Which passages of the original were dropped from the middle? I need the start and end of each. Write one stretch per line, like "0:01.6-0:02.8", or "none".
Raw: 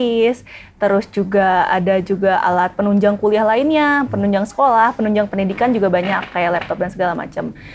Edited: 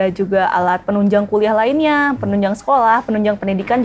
none

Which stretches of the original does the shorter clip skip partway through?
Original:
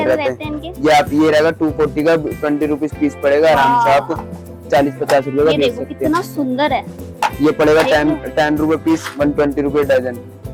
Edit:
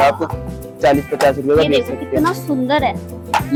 none

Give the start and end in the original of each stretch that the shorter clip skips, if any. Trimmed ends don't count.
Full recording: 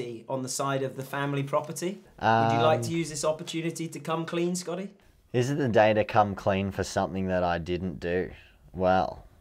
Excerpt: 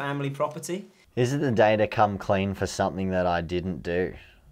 0:02.1-0:05.1

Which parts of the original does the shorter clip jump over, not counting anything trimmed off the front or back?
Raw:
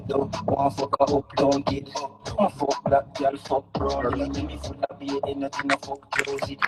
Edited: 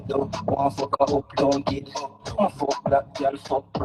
none

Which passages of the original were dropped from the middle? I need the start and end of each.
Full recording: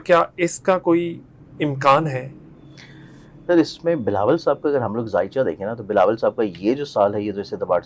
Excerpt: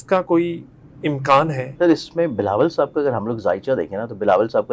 0:02.2-0:03.3

